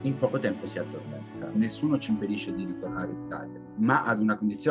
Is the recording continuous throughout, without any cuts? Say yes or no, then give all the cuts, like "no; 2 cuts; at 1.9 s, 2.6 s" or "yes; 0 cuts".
no; 1 cut; at 1.5 s